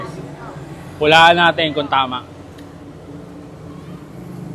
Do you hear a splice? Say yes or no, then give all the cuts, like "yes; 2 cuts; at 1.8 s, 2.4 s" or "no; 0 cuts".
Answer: no; 0 cuts